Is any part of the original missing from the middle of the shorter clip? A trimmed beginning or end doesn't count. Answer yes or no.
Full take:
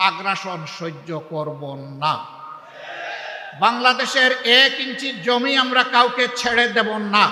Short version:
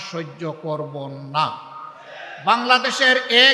yes